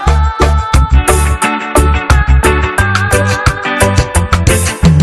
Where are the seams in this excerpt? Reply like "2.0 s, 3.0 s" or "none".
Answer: 2.0 s